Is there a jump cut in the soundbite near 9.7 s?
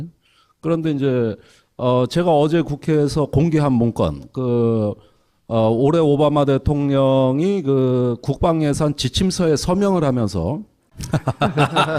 no; 1 cut; at 0.9 s

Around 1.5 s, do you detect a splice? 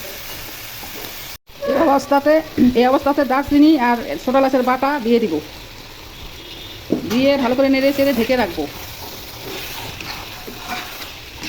yes; 1 cut; at 1.5 s

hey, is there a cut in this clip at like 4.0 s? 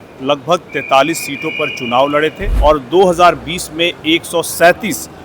no; 1 cut; at 2.5 s

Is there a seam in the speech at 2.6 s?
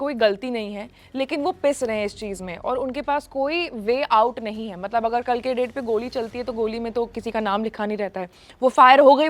no; 0 cuts

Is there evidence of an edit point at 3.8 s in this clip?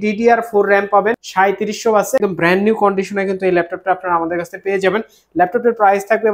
no; 2 cuts; at 1.2 s, 2.2 s

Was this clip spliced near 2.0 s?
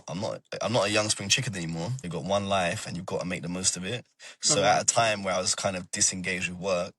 yes; 1 cut; at 2.0 s

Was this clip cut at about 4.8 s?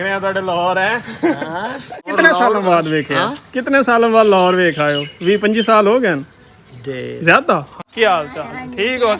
no; 2 cuts; at 2.1 s, 7.7 s

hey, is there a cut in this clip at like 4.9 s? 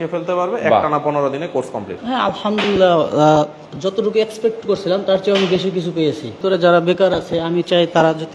no; 2 cuts; at 1.9 s, 6.3 s

